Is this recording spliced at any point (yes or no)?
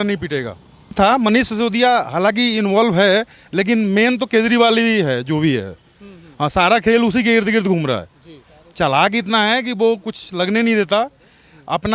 yes